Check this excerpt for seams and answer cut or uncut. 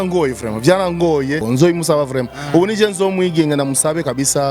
cut